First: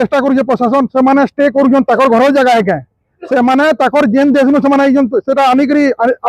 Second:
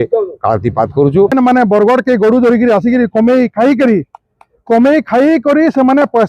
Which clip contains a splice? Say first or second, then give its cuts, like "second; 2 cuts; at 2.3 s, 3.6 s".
second; 1 cut; at 1.3 s